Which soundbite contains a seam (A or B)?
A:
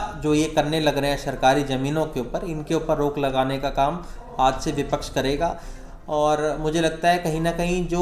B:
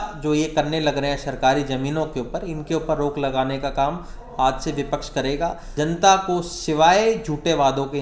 B